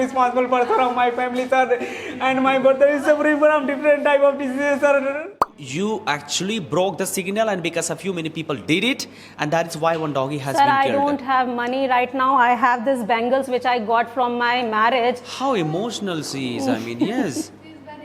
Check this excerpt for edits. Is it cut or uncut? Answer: cut